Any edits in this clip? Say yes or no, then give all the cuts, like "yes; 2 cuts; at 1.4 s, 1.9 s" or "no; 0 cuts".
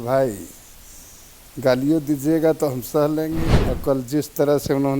yes; 1 cut; at 3.5 s